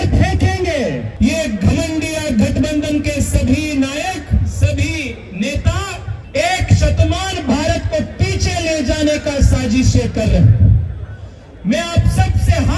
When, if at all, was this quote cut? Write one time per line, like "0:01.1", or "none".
0:01.1
0:06.1